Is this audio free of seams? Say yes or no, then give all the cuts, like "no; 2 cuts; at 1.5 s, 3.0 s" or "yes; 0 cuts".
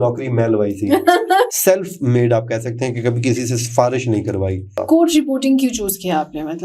no; 2 cuts; at 1.5 s, 4.7 s